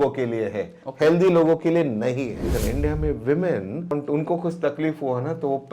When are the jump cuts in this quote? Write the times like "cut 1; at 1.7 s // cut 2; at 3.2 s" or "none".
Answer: cut 1; at 2.5 s // cut 2; at 3.9 s